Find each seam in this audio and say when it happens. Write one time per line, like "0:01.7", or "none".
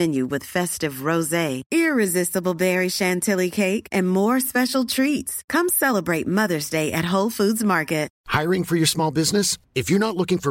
0:08.2